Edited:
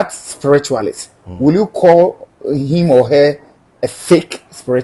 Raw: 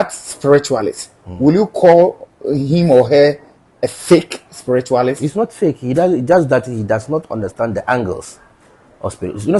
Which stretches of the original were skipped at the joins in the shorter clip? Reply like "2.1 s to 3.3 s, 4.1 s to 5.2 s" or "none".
none

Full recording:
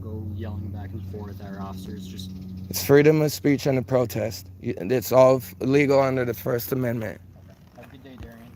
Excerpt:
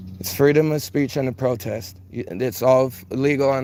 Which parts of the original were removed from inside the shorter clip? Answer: none

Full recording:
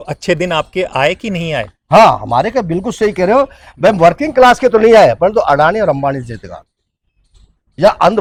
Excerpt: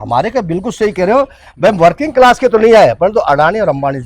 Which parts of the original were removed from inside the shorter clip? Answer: none

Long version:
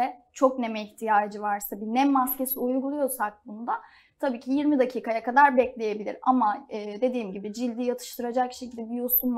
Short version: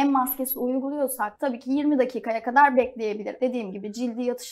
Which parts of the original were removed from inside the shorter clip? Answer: 3.3 s to 4.1 s, 6.1 s to 6.9 s

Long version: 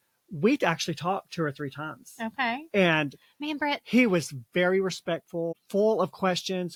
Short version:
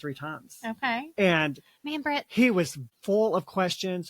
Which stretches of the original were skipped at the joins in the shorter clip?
4.4 s to 5.5 s

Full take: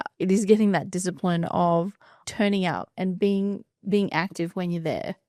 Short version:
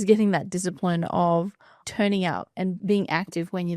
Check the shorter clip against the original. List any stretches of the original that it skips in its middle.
3.2 s to 3.8 s

